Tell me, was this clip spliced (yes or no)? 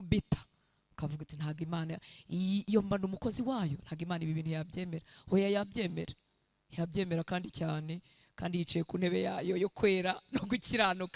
no